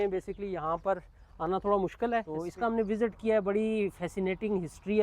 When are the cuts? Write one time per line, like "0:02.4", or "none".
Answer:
0:02.4